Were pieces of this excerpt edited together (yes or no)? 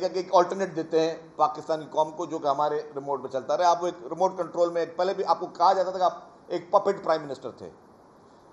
no